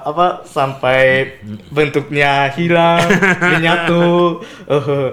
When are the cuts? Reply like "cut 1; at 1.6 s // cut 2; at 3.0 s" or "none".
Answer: none